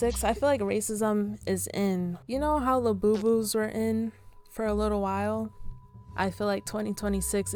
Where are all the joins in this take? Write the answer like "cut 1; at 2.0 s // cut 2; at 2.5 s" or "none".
none